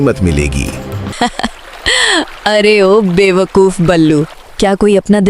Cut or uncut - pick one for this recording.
cut